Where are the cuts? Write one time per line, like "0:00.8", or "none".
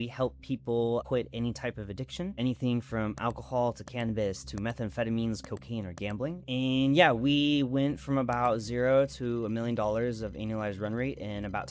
0:01.0
0:02.4
0:06.4